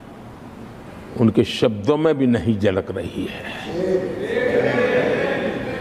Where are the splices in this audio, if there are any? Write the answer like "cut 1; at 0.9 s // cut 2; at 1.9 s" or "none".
none